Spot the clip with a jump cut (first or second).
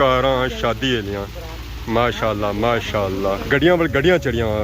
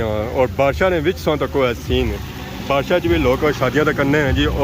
first